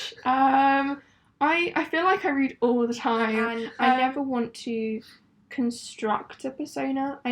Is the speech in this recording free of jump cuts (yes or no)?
no